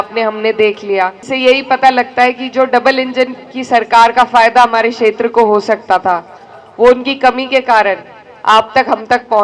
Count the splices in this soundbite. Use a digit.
1